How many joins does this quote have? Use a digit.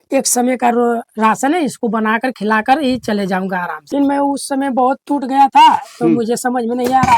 1